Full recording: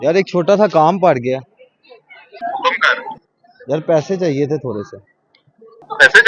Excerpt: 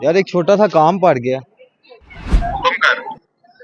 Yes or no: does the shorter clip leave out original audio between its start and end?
no